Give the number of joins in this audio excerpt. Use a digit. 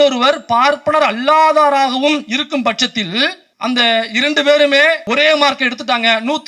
2